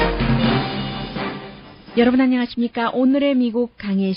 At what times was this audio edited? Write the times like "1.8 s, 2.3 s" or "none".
2.2 s